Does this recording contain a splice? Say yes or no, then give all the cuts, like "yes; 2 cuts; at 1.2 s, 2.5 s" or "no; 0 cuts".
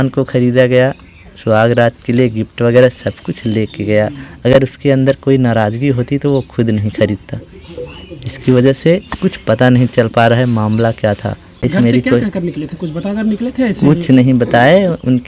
no; 0 cuts